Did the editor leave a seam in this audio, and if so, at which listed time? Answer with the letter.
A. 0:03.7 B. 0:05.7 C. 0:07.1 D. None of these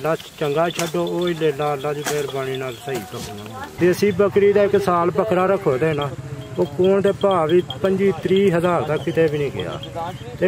A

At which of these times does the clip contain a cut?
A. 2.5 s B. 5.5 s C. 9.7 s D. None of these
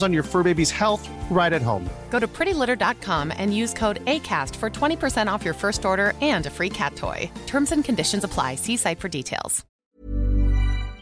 C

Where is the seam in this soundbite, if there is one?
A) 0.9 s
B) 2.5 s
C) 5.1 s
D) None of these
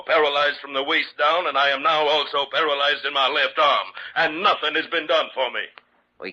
B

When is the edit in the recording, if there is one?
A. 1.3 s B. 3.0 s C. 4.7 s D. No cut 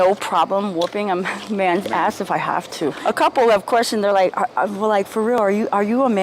B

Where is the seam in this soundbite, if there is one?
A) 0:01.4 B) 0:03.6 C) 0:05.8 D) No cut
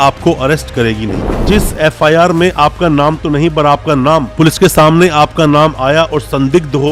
A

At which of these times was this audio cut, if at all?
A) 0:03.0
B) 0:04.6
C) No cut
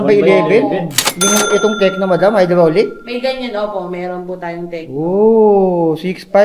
C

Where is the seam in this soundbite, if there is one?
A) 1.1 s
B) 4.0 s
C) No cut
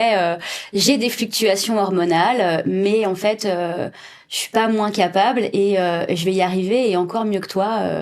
C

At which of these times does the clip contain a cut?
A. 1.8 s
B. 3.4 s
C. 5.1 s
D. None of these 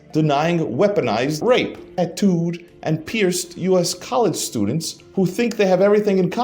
A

